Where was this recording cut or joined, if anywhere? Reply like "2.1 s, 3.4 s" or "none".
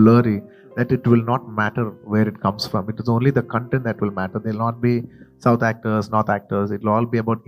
none